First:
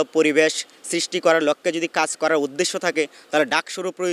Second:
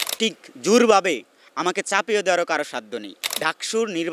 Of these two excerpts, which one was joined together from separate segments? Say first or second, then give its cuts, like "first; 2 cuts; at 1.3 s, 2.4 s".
second; 1 cut; at 3.2 s